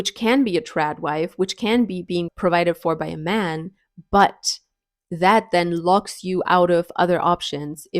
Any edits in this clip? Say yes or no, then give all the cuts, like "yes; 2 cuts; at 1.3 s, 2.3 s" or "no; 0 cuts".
yes; 1 cut; at 2.3 s